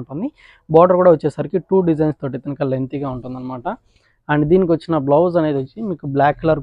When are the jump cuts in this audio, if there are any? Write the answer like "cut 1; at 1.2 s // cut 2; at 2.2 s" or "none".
none

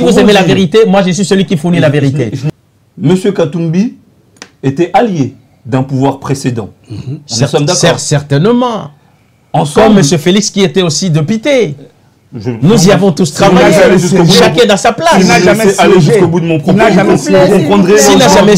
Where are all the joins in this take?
cut 1; at 2.4 s

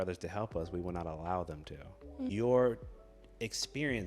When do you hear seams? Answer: cut 1; at 2.3 s

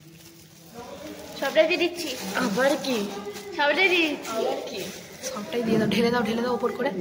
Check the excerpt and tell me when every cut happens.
none

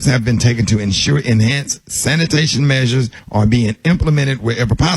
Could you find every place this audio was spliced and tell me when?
cut 1; at 3.2 s

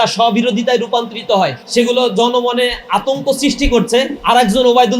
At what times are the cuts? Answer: cut 1; at 1.6 s // cut 2; at 4.2 s

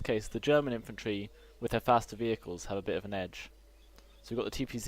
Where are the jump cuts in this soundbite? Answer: cut 1; at 3.4 s

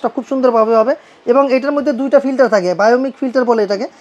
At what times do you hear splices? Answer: none

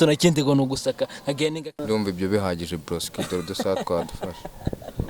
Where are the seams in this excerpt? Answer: cut 1; at 1.6 s

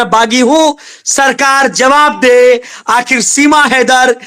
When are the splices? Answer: none

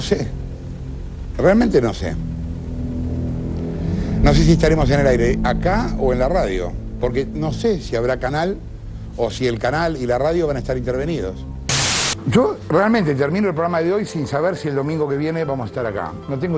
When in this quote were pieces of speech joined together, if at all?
cut 1; at 12.0 s

